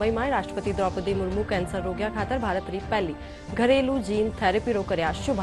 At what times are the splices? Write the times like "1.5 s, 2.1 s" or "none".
none